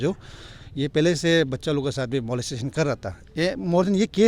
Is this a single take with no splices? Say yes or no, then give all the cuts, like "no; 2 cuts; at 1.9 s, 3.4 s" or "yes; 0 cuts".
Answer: yes; 0 cuts